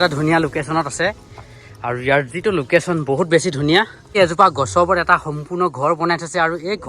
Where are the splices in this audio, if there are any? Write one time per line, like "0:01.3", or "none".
0:04.1